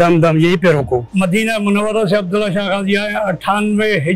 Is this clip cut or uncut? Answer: cut